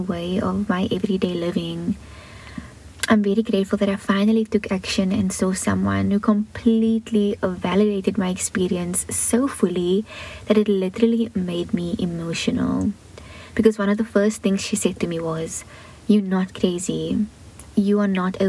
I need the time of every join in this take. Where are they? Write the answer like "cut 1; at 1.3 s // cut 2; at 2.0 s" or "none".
none